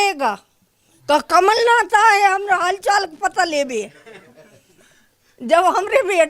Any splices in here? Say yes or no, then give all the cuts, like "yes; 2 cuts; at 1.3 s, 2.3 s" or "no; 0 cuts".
no; 0 cuts